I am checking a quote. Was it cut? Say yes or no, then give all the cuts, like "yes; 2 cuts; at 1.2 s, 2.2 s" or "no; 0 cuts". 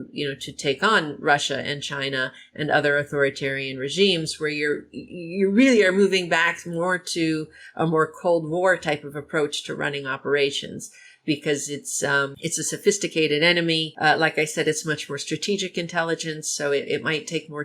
yes; 2 cuts; at 12.3 s, 13.9 s